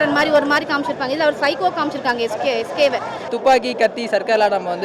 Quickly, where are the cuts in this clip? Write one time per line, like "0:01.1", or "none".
0:03.3